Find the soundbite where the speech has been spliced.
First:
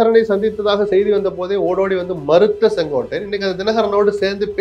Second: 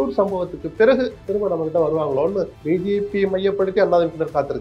second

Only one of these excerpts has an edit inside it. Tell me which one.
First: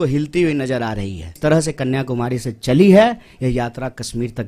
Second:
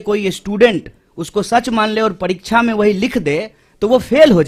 first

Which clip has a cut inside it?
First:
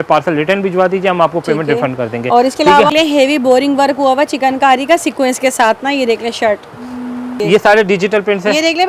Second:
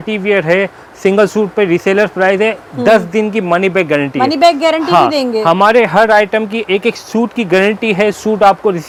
first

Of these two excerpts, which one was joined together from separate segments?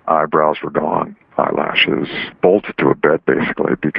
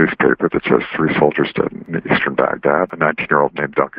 second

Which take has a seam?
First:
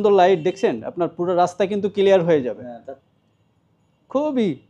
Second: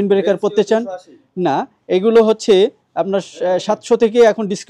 first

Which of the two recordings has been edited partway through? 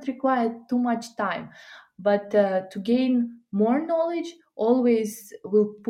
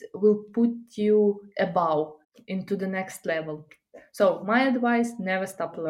second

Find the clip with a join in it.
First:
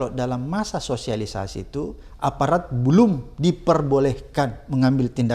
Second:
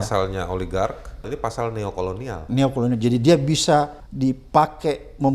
second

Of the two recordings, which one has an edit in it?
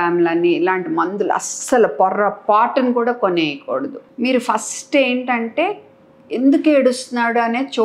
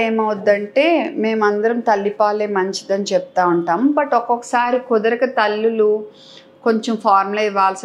first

